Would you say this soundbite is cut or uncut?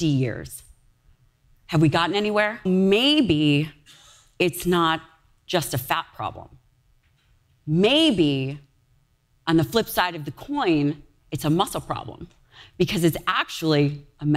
cut